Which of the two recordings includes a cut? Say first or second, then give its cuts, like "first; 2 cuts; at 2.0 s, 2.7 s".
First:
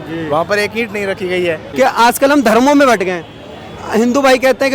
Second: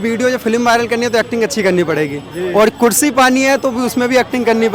first; 1 cut; at 1.6 s